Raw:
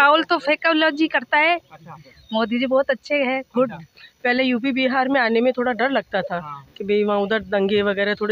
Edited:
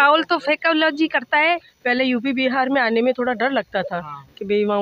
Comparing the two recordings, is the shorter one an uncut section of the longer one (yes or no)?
no